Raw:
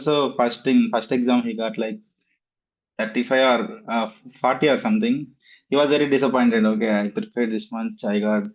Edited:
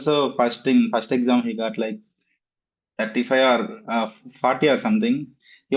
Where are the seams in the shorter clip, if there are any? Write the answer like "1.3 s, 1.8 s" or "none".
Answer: none